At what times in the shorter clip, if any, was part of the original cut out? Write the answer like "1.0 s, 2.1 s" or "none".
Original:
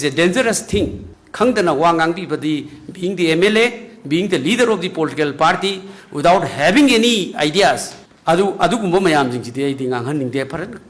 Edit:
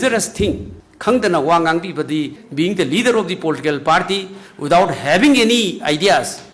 2.4 s